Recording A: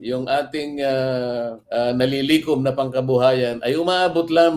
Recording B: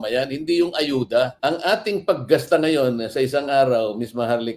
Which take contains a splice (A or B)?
B